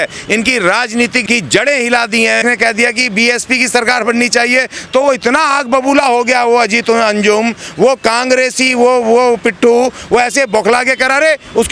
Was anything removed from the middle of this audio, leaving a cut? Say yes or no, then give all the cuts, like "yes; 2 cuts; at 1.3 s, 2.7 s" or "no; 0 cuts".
yes; 2 cuts; at 1.2 s, 2.4 s